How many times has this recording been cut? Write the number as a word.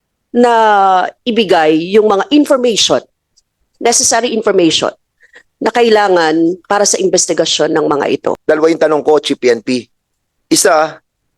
one